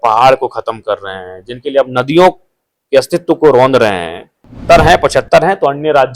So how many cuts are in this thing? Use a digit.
1